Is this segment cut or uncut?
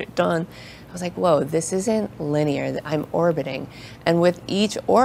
uncut